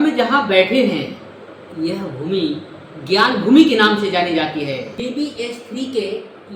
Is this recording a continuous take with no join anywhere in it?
no; 1 cut; at 4.9 s

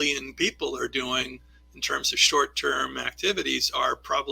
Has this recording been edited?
no; 0 cuts

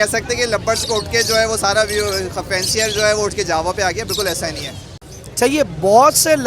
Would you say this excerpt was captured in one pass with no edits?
no; 1 cut; at 4.7 s

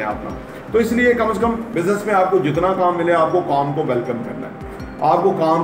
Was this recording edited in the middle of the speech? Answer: yes; 1 cut; at 1.7 s

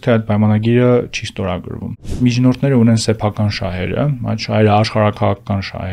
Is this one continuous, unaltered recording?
no; 1 cut; at 2.2 s

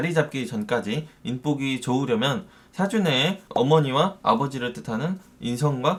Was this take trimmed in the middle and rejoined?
no; 0 cuts

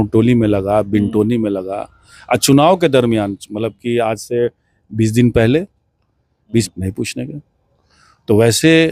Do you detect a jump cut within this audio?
yes; 1 cut; at 6.7 s

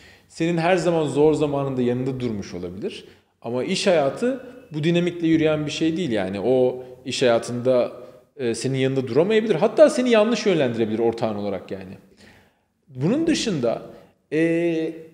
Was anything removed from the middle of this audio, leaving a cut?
no; 0 cuts

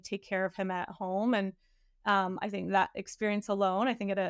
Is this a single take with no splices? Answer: yes; 0 cuts

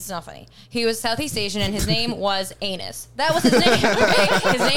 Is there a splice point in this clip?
no; 0 cuts

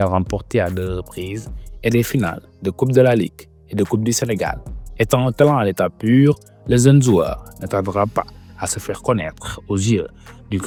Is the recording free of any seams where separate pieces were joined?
yes; 0 cuts

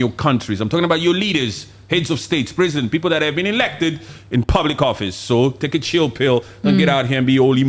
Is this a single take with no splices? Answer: yes; 0 cuts

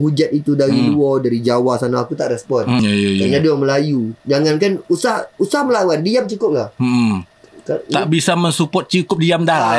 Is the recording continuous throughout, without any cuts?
no; 1 cut; at 2.8 s

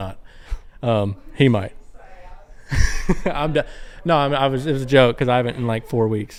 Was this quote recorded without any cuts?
yes; 0 cuts

